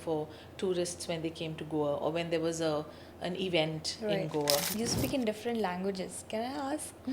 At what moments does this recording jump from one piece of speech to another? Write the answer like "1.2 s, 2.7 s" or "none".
4.7 s